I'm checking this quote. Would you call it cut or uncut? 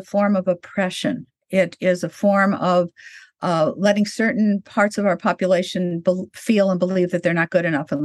uncut